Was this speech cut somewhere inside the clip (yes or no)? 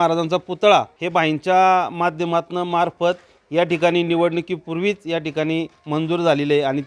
yes